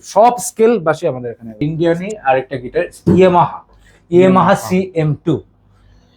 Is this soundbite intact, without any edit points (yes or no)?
no